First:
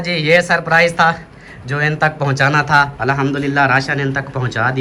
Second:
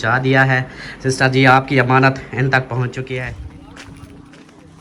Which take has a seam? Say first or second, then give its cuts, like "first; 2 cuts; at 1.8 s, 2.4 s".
second; 1 cut; at 3.3 s